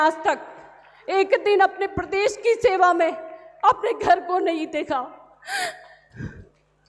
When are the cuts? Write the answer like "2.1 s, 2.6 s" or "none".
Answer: none